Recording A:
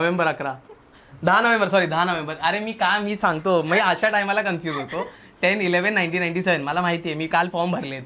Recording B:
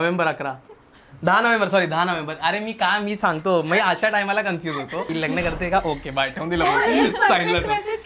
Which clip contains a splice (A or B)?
B